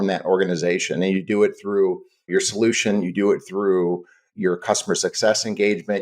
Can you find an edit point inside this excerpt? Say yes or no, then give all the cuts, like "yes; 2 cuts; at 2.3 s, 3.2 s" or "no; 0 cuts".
yes; 1 cut; at 2.3 s